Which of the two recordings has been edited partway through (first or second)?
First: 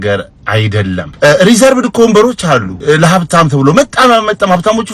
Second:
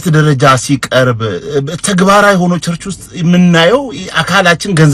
first